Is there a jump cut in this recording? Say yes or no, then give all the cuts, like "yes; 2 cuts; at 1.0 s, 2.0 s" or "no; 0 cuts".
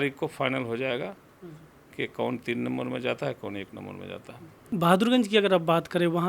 yes; 1 cut; at 4.6 s